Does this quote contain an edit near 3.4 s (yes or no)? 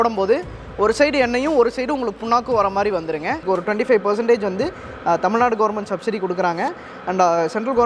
yes